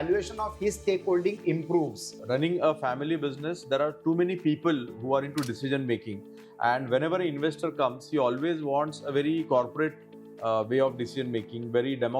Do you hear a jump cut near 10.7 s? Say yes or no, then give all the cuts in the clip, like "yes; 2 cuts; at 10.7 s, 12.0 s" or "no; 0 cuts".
no; 1 cut; at 2.1 s